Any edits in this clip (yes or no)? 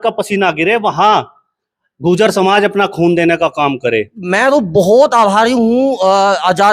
yes